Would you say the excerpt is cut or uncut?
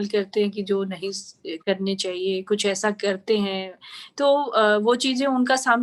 uncut